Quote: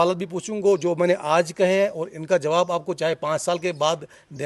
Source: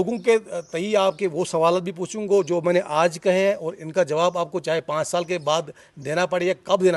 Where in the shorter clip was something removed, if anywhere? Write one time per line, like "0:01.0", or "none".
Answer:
none